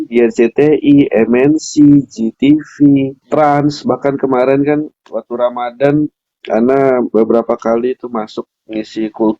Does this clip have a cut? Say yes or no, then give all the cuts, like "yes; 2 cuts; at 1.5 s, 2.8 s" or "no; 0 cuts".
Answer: yes; 1 cut; at 3.2 s